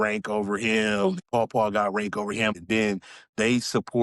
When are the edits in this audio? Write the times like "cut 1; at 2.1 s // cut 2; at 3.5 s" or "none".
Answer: cut 1; at 1.2 s // cut 2; at 2.6 s